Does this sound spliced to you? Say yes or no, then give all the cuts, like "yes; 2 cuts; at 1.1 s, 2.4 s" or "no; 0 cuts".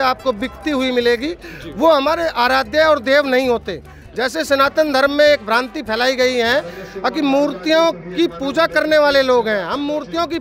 no; 0 cuts